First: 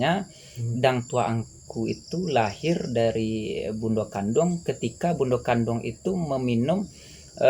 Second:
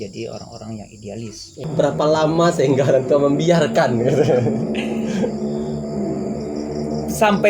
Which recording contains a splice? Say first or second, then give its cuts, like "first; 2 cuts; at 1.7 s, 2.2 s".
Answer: second; 1 cut; at 1.9 s